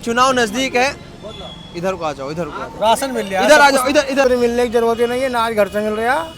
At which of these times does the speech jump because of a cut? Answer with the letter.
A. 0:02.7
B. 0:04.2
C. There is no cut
B